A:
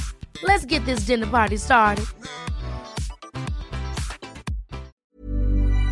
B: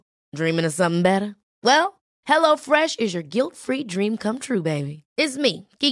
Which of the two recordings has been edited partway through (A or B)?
A